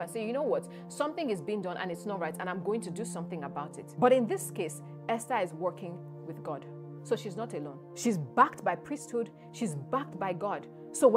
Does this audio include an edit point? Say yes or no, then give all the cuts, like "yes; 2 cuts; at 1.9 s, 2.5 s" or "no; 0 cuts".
yes; 2 cuts; at 3.8 s, 7.8 s